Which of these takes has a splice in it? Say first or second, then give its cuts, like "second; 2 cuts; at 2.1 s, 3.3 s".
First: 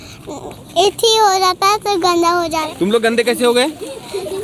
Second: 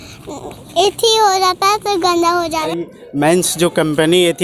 second; 1 cut; at 2.7 s